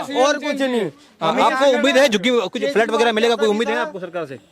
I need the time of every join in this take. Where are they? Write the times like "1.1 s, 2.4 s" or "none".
none